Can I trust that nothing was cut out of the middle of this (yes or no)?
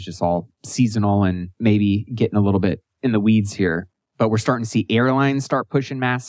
no